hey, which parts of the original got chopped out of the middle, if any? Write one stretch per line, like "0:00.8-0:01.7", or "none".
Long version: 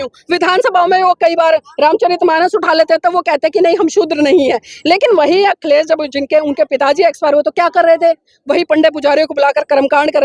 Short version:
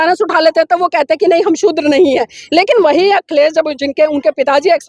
none